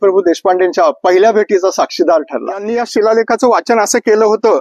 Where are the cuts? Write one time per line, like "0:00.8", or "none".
0:02.7